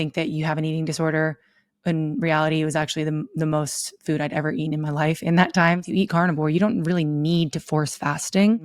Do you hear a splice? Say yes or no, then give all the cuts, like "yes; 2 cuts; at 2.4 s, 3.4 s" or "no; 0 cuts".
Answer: yes; 1 cut; at 5.9 s